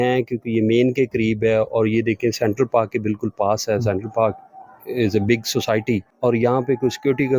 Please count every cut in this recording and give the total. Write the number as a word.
one